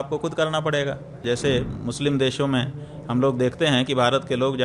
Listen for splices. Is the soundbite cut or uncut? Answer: cut